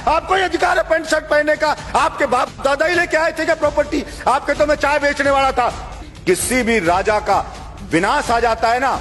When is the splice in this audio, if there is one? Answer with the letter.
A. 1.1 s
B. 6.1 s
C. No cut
B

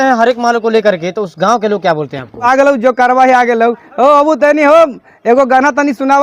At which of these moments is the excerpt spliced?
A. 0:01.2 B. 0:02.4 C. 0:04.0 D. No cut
B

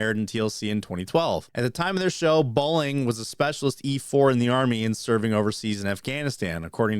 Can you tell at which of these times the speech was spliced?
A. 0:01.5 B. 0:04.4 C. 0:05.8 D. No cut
A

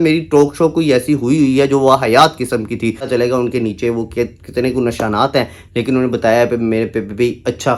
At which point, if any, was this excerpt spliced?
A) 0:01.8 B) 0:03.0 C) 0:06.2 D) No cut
B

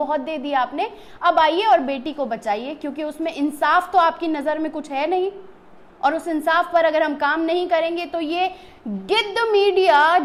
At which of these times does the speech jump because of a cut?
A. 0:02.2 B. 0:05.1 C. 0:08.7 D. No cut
D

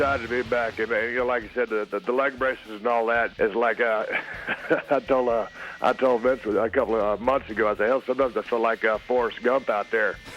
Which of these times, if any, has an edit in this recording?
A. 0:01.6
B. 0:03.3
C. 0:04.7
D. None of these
B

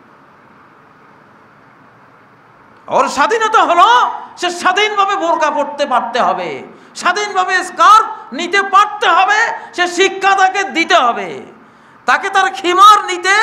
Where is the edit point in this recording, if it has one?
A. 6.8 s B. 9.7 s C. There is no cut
C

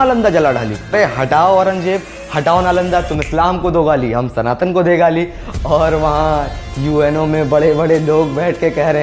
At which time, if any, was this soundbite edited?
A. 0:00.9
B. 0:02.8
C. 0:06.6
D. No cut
A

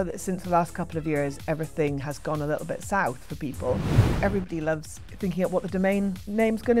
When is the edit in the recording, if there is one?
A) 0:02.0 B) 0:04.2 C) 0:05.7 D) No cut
B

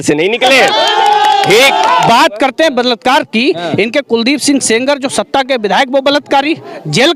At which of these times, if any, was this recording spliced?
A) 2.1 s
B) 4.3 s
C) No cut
A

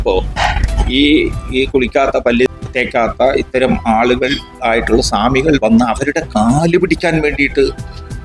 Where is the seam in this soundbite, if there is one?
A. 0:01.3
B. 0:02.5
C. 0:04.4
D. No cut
B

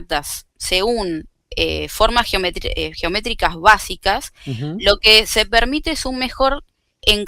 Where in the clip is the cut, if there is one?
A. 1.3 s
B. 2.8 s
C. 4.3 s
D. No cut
D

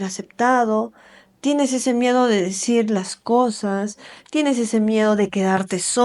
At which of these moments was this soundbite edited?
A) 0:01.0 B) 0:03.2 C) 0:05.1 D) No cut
D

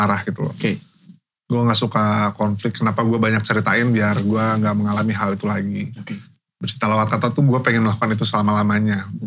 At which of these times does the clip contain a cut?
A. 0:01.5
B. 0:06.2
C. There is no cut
C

